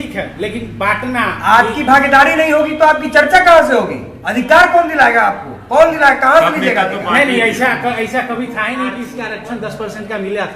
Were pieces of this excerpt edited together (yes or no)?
yes